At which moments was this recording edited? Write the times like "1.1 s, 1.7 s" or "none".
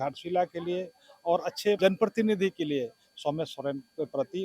1.8 s